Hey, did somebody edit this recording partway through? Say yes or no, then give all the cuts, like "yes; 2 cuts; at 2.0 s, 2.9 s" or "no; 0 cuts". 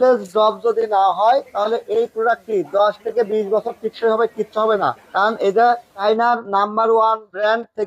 no; 0 cuts